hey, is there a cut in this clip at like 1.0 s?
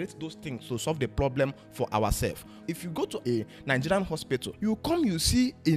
no; 2 cuts; at 2.7 s, 4.5 s

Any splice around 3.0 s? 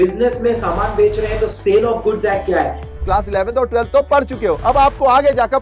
yes; 1 cut; at 3.0 s

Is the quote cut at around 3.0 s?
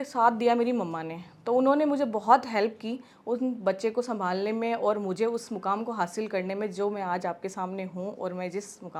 no; 0 cuts

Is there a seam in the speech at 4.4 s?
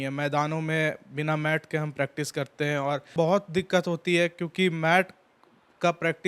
no; 1 cut; at 3.1 s

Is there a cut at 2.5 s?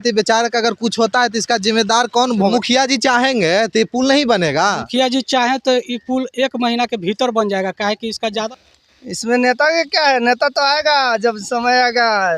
yes; 2 cuts; at 2.5 s, 8.5 s

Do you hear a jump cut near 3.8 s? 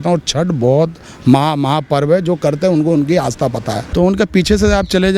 yes; 1 cut; at 3.8 s

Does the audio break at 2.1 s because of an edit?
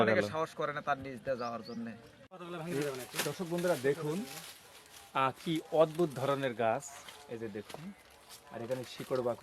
yes; 1 cut; at 2.1 s

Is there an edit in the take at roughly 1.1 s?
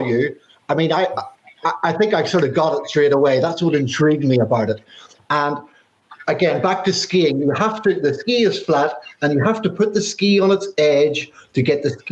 no; 0 cuts

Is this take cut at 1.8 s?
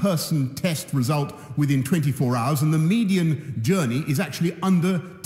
yes; 1 cut; at 1.8 s

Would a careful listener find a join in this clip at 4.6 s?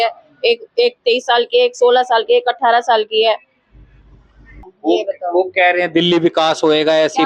yes; 1 cut; at 4.6 s

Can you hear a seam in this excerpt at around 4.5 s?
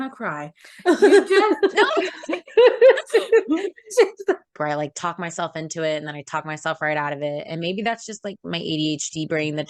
yes; 1 cut; at 4.5 s

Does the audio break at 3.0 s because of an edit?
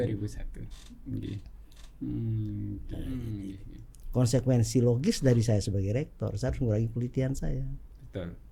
yes; 1 cut; at 3.0 s

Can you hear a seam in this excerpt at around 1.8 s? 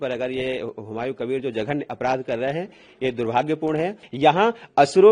no; 1 cut; at 4.0 s

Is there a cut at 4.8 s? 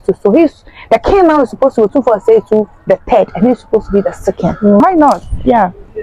yes; 1 cut; at 4.8 s

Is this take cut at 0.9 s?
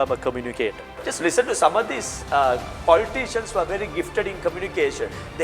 yes; 1 cut; at 0.9 s

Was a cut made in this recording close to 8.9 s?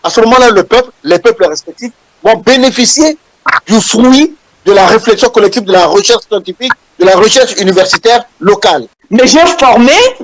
yes; 1 cut; at 8.9 s

